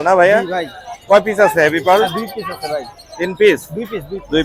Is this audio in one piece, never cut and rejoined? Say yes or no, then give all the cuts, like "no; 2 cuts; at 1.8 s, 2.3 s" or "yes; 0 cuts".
yes; 0 cuts